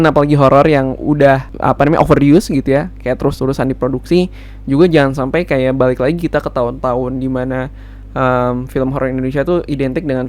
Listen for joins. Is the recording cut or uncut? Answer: cut